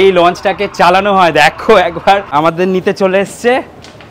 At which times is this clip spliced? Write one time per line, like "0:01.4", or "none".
0:02.3